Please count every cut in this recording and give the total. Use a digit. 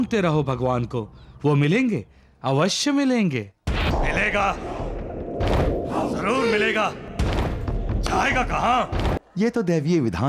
1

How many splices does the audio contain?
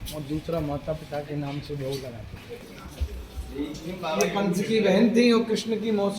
1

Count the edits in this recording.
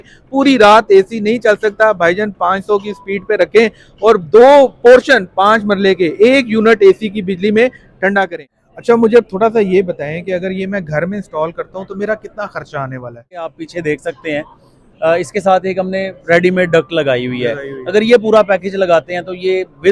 2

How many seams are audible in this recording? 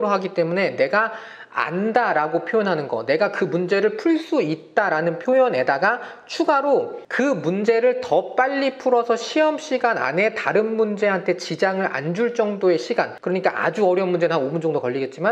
2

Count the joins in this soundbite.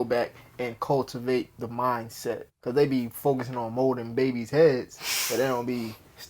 1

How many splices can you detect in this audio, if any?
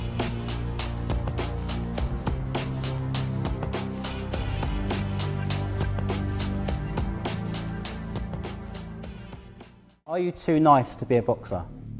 0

